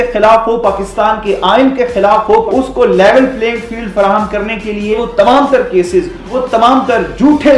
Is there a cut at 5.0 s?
yes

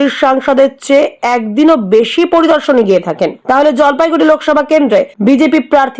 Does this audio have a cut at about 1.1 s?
no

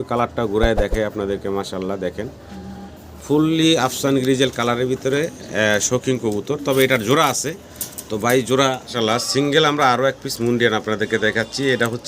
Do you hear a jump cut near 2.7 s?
no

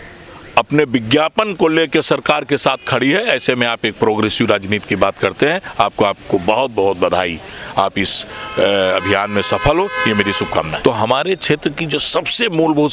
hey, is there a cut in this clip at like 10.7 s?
yes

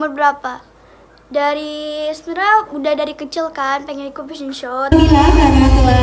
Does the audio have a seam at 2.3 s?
no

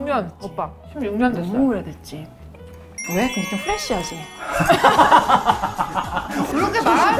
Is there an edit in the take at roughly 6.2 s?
no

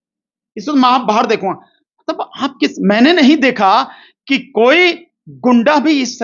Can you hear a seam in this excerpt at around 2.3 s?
no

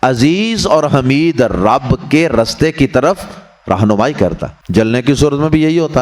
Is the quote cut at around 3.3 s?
no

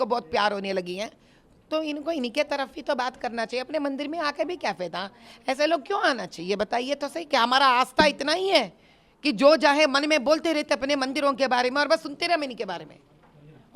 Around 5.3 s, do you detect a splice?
no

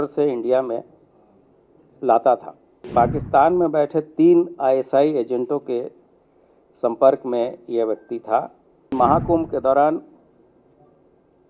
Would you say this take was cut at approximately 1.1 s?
no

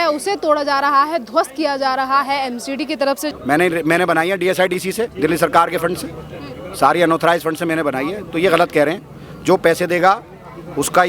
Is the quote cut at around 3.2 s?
yes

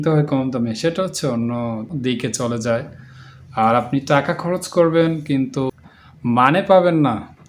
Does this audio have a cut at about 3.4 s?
no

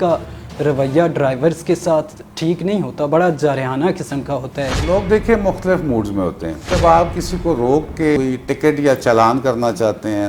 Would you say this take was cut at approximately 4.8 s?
yes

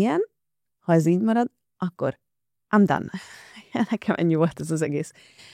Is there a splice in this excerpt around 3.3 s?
no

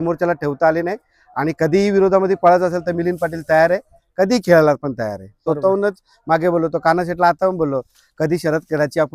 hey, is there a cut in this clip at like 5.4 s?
yes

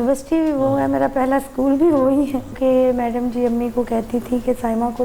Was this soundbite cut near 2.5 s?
yes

